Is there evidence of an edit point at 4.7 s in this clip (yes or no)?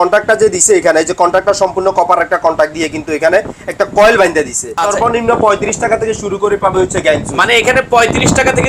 yes